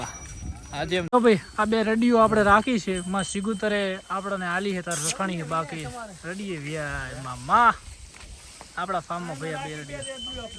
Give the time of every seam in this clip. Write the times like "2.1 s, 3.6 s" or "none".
1.1 s